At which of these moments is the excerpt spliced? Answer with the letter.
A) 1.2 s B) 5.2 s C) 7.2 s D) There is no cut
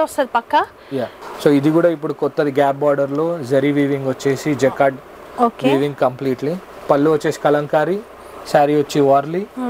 A